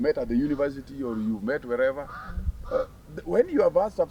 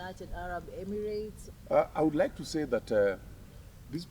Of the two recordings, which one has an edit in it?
second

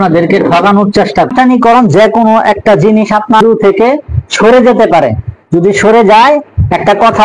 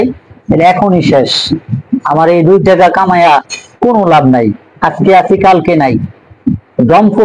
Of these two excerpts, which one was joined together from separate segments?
first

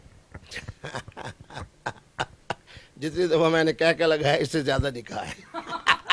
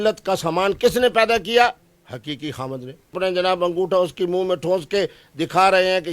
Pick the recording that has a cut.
second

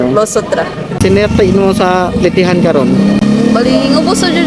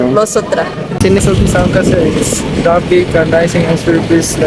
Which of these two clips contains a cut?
second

